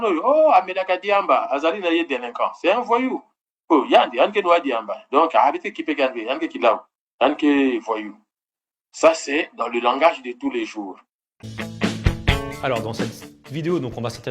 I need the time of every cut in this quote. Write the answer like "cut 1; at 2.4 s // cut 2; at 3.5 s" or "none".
cut 1; at 11.3 s

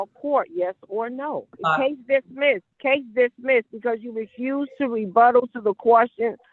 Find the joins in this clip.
cut 1; at 1.5 s // cut 2; at 2.7 s

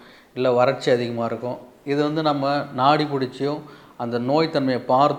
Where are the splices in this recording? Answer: none

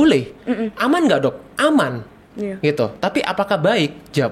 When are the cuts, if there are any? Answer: cut 1; at 2.2 s

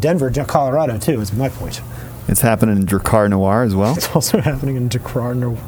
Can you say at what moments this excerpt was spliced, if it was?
none

